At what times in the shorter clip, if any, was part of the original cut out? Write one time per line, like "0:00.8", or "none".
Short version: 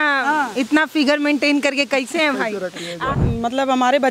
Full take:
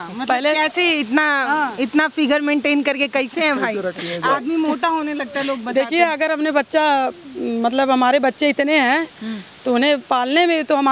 0:03.1